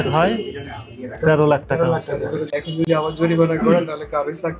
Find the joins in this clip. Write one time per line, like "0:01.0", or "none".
0:02.5

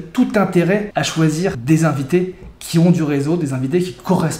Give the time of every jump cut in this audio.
0:01.3

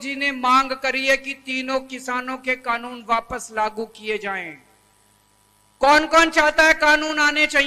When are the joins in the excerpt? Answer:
none

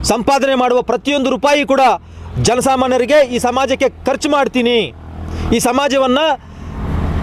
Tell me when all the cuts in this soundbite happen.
none

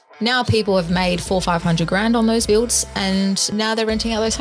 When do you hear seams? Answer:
0:02.4
0:03.5

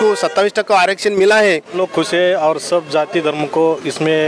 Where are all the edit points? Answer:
0:01.7

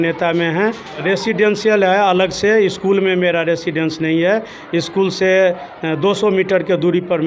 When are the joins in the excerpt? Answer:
0:00.9

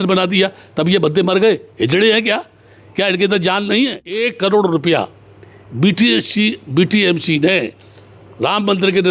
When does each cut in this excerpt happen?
0:04.1

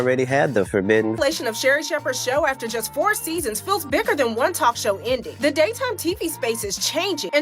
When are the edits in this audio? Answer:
0:01.1

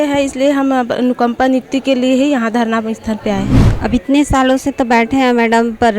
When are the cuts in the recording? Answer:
0:03.6

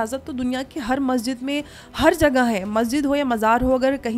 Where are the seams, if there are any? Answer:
none

